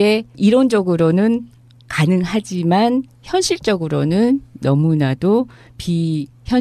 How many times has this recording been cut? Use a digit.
1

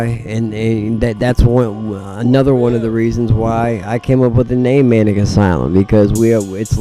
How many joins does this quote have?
0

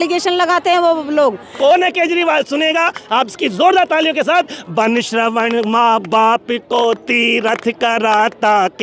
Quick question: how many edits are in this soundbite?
1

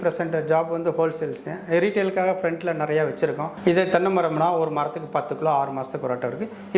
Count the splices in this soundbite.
1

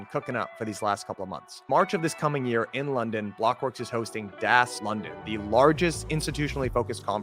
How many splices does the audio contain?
1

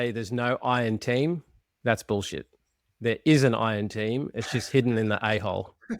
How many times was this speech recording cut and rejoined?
0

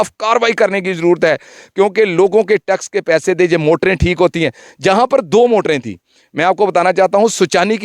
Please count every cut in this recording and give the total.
0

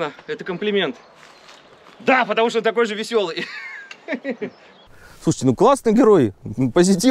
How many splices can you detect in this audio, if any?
1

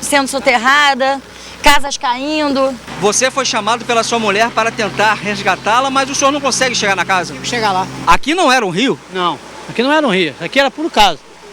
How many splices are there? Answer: 2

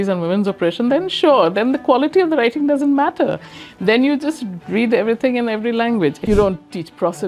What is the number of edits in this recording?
1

